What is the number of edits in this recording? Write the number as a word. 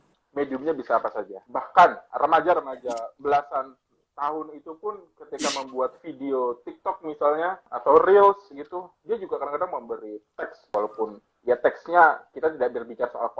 four